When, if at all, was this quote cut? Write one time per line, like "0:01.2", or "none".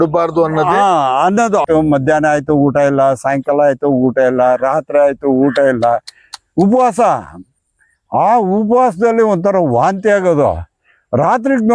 0:01.6